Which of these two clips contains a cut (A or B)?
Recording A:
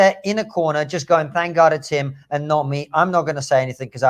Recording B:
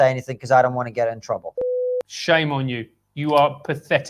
B